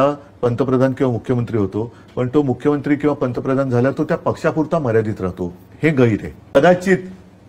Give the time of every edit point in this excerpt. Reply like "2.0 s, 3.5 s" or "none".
6.5 s